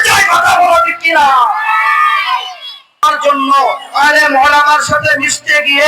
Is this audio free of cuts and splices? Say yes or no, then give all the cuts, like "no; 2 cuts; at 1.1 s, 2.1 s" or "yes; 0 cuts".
no; 1 cut; at 3.0 s